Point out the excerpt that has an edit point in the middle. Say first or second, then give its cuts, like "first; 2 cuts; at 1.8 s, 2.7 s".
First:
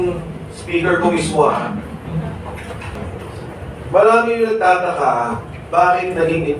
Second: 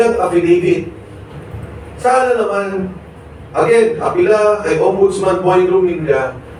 first; 1 cut; at 3.0 s